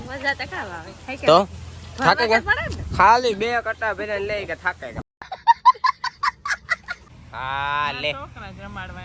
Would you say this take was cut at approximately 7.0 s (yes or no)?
yes